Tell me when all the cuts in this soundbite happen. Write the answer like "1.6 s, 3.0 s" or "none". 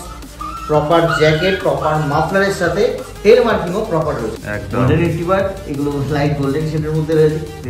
4.4 s